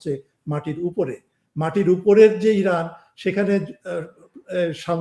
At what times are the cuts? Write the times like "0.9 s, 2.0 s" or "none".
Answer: none